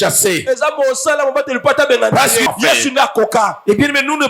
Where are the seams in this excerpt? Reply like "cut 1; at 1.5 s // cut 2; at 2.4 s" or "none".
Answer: cut 1; at 2.5 s